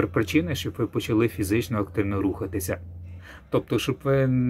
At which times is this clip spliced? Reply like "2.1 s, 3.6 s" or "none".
3.3 s